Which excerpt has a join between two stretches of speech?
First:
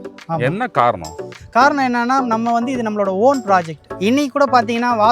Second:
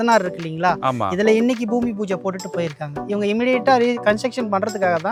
first; 1 cut; at 3.9 s

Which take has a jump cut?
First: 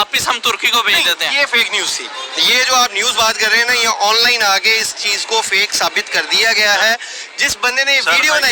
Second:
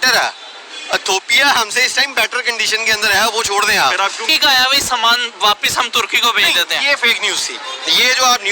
second; 1 cut; at 4.3 s

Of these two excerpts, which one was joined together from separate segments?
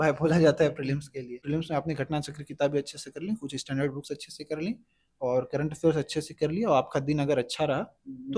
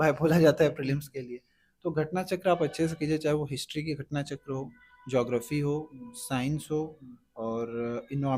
first; 1 cut; at 1.4 s

